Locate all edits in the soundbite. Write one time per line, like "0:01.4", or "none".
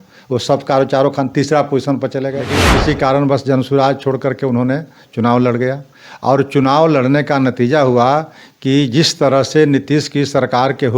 0:02.7